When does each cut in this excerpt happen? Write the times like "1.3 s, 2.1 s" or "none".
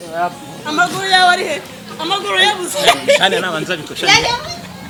none